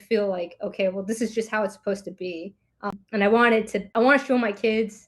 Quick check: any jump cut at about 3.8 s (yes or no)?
yes